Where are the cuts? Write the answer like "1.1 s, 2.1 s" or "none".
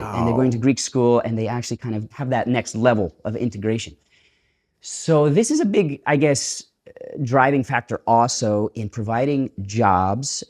2.1 s